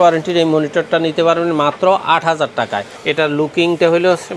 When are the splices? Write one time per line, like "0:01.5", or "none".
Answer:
0:02.9